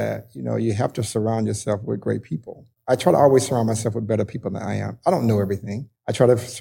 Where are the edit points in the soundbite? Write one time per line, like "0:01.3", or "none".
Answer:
0:02.7